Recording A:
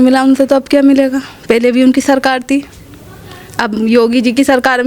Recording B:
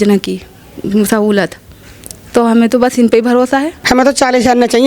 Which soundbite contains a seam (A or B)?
B